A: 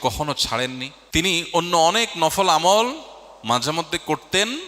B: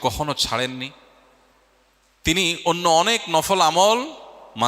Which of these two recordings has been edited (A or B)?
A